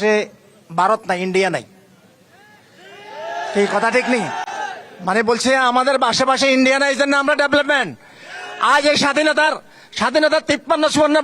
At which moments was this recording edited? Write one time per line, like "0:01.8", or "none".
none